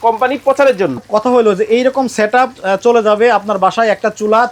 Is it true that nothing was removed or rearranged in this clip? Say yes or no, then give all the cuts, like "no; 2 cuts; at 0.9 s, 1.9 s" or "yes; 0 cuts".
no; 1 cut; at 1.0 s